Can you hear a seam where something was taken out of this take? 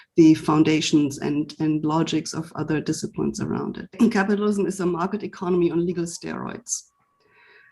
yes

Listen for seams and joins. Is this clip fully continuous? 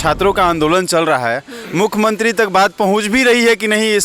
yes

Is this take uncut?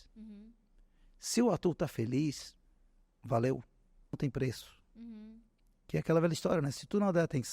no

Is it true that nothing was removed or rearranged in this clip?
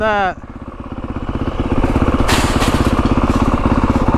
yes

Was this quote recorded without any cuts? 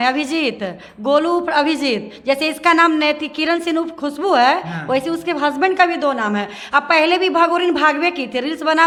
yes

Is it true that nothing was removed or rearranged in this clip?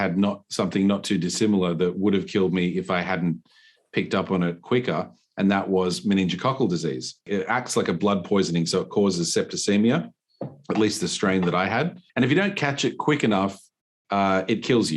no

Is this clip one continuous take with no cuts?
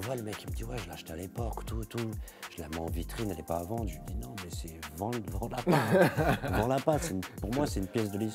yes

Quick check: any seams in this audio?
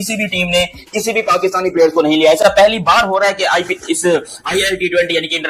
no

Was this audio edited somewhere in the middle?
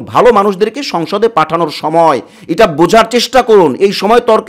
no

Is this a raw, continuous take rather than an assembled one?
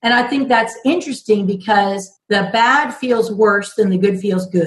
no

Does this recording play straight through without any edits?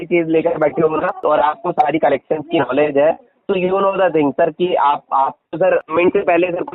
no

